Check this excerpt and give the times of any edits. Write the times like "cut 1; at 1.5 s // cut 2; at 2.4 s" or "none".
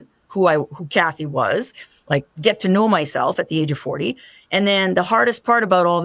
cut 1; at 2.3 s